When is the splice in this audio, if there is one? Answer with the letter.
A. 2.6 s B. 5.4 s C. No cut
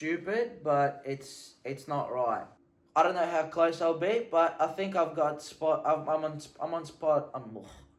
A